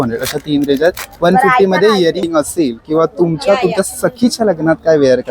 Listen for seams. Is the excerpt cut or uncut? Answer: cut